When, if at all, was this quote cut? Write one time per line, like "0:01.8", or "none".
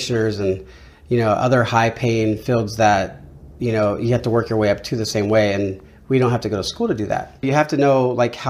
0:07.5